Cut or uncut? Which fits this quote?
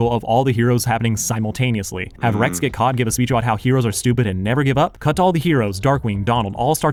uncut